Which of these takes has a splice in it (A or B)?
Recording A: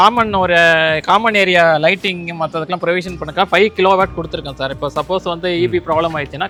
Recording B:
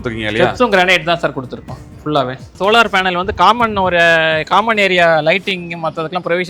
B